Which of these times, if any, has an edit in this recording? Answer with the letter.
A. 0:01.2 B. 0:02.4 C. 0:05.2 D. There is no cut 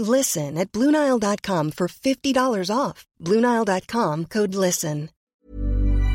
C